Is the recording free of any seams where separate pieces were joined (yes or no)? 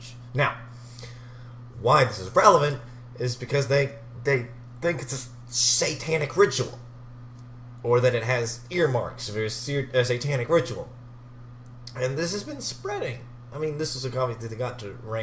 no